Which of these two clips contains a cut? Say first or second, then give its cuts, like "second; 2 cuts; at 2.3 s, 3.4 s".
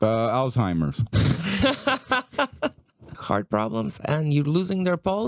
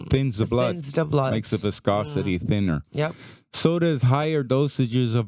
first; 1 cut; at 3.1 s